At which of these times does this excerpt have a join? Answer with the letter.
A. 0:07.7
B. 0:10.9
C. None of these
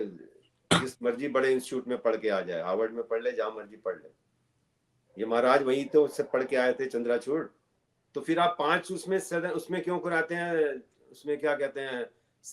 A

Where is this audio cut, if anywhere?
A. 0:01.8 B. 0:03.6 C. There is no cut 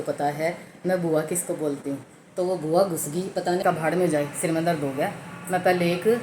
B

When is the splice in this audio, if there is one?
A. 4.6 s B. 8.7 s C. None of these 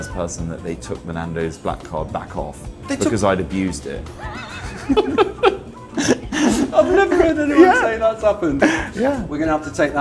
C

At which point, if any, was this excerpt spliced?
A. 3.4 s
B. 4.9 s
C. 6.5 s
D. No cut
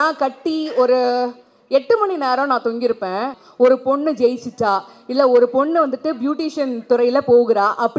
A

